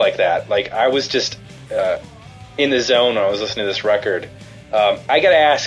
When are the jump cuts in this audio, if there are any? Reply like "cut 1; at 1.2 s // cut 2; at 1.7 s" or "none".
none